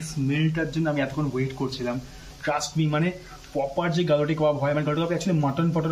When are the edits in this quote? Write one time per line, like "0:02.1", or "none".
none